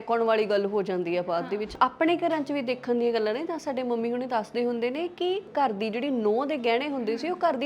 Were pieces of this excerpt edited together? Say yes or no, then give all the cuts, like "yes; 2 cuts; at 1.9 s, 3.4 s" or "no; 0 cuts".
yes; 2 cuts; at 1.7 s, 5.5 s